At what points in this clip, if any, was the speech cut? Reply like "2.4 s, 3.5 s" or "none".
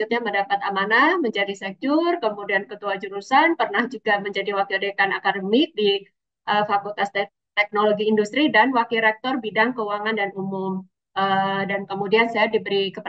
11.0 s